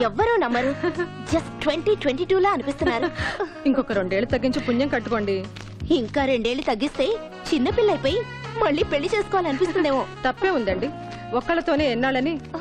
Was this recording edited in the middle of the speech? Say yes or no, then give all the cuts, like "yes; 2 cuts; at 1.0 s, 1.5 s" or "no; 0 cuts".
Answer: no; 0 cuts